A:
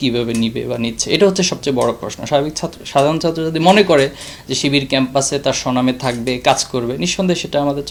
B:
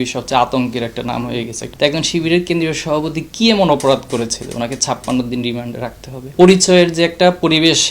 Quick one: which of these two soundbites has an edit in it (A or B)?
B